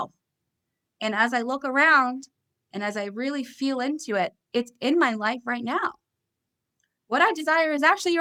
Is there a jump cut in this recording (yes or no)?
no